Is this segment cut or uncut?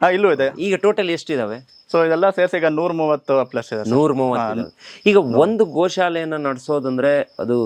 uncut